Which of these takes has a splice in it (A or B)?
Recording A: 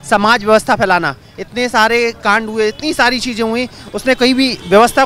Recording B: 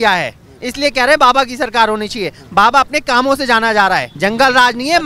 B